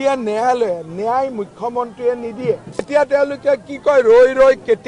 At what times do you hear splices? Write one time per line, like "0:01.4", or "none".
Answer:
0:02.9